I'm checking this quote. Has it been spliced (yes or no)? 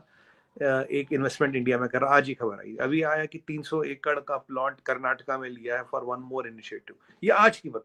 no